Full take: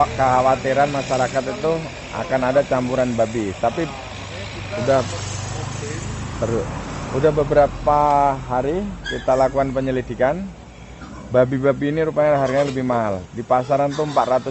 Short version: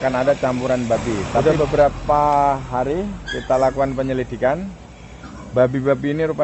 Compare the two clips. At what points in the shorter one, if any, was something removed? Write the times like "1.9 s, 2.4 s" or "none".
1.4 s